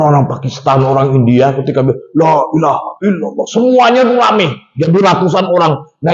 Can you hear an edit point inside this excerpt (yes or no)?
no